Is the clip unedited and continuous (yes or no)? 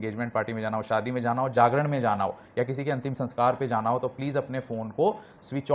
yes